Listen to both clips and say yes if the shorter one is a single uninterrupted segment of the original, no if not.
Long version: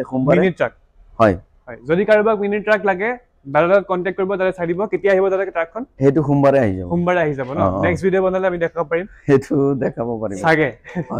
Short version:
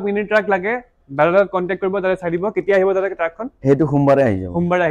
yes